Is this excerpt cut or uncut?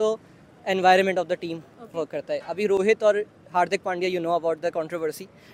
uncut